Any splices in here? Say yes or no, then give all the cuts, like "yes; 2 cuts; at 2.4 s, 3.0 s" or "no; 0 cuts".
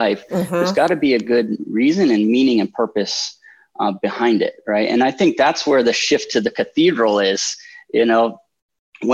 no; 0 cuts